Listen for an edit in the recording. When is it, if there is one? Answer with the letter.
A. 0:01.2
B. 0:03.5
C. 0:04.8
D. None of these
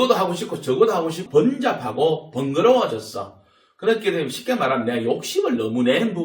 A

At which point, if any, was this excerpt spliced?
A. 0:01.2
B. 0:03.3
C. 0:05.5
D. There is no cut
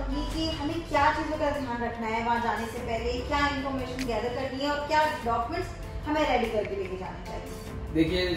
D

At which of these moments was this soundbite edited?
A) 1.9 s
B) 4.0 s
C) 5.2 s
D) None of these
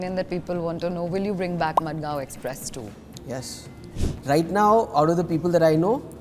B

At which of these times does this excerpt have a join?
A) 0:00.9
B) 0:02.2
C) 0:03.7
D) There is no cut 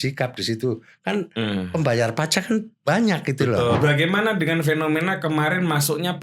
C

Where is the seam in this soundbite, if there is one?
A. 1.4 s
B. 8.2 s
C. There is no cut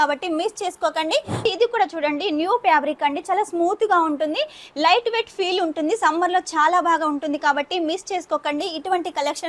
A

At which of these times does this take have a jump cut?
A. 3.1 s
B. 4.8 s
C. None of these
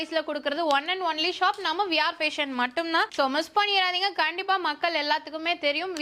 C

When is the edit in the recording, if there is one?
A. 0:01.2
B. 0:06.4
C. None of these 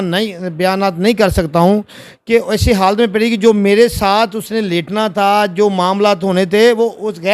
C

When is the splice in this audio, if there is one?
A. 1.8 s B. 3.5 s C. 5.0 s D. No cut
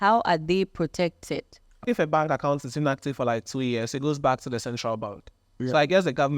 A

